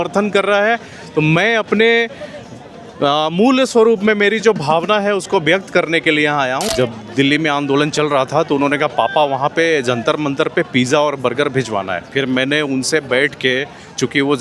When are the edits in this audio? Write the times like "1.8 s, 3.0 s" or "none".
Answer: 6.7 s